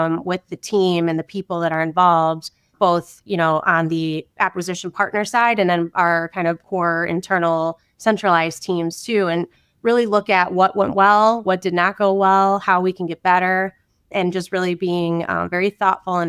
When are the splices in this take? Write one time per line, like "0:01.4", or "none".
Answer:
none